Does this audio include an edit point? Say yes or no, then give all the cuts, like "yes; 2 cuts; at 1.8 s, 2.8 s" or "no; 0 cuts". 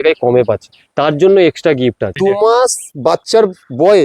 yes; 1 cut; at 2.2 s